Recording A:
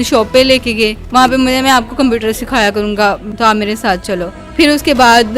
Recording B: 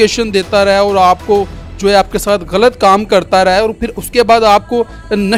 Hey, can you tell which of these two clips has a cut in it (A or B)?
A